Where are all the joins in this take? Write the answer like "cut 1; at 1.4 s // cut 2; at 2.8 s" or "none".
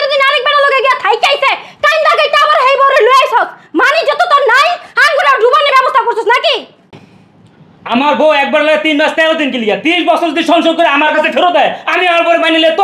none

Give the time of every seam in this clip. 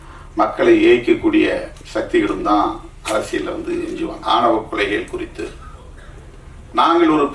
cut 1; at 4.2 s

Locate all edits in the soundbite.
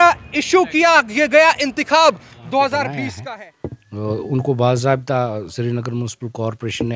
cut 1; at 3.2 s

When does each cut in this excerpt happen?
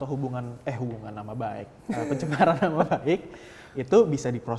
none

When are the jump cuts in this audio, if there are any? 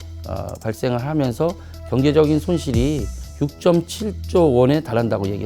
cut 1; at 3.2 s

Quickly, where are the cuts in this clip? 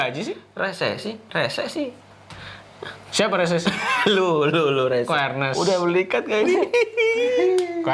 none

